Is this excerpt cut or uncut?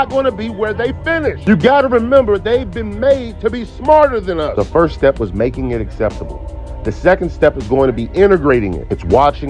cut